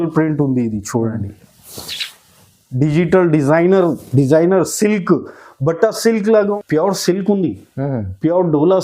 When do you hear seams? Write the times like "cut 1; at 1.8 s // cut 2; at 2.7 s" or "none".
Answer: cut 1; at 6.5 s